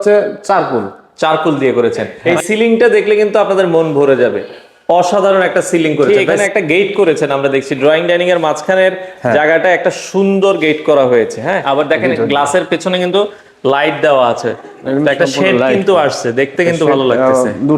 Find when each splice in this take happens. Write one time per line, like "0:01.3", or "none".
0:02.1
0:06.4
0:11.6